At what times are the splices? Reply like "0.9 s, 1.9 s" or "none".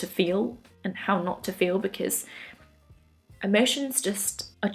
none